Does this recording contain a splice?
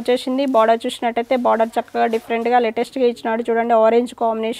no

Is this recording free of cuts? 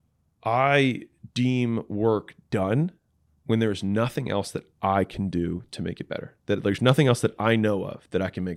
yes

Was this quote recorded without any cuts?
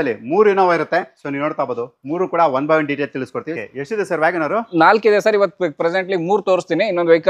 no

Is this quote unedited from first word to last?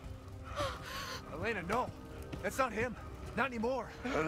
yes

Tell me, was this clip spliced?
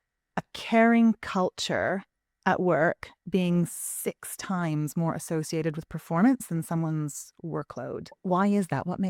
yes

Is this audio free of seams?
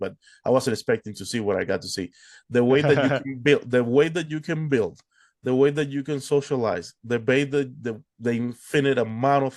yes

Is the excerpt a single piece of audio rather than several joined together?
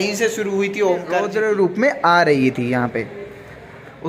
no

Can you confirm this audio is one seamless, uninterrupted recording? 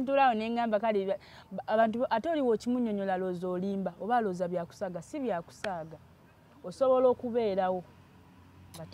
yes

